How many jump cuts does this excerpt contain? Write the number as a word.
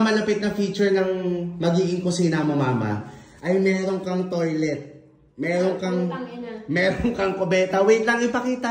zero